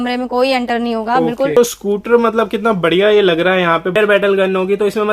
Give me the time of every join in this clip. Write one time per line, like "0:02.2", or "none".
0:01.6
0:04.0